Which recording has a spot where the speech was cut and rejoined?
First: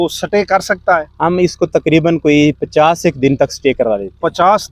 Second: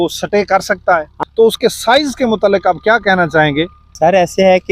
second; 2 cuts; at 1.1 s, 3.8 s

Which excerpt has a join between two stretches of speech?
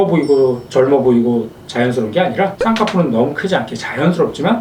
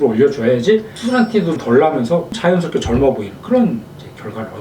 second; 2 cuts; at 0.9 s, 2.3 s

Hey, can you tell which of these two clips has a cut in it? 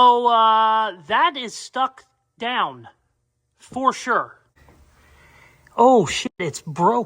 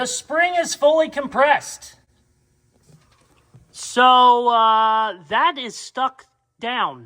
first; 1 cut; at 4.4 s

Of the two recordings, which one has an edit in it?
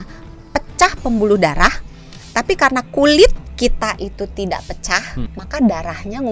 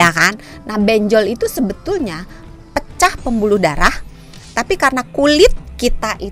first; 1 cut; at 5.3 s

